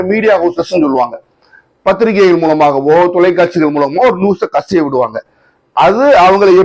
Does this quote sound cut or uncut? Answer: uncut